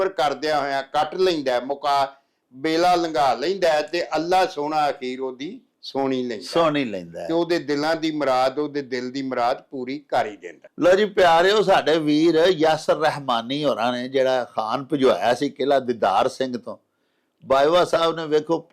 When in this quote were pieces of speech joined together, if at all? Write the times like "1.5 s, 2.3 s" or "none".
none